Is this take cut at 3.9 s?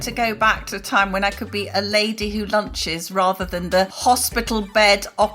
yes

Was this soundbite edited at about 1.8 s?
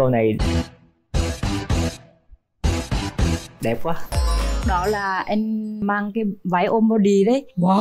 no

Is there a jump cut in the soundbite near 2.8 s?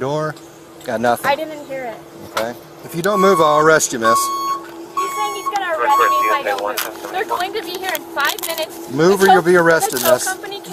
yes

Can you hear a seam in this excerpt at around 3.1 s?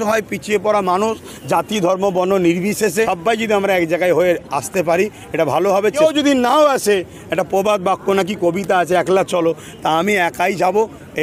yes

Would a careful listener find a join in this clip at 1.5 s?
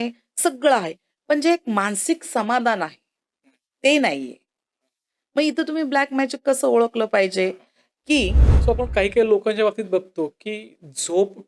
no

